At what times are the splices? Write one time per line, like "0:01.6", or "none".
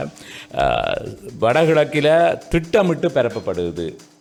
none